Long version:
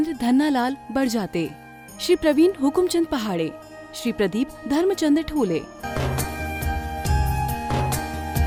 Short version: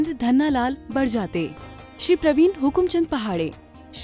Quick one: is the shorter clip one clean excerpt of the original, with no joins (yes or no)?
yes